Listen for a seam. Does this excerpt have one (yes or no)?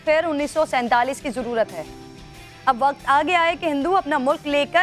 no